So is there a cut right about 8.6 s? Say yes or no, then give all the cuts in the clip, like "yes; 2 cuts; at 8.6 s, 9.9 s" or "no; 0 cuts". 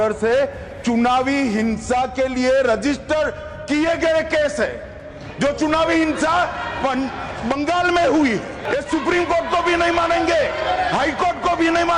yes; 1 cut; at 8.6 s